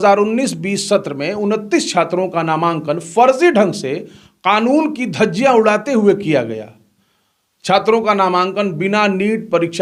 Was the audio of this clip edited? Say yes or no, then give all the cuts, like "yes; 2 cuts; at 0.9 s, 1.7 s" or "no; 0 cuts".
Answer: no; 0 cuts